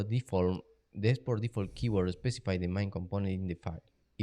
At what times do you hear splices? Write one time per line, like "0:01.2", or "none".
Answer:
0:03.1